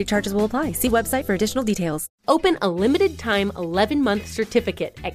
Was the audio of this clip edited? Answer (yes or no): yes